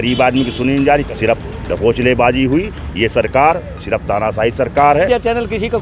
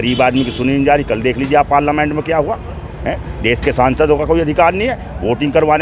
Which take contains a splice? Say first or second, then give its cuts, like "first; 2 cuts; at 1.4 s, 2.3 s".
first; 2 cuts; at 1.1 s, 5.1 s